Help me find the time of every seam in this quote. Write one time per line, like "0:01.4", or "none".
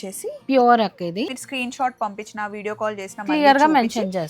0:01.3